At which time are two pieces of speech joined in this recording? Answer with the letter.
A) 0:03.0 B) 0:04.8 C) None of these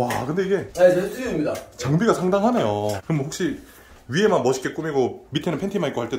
A